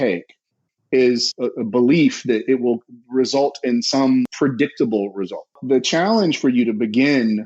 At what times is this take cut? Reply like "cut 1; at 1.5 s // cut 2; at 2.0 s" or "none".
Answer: cut 1; at 1.3 s // cut 2; at 4.3 s // cut 3; at 5.6 s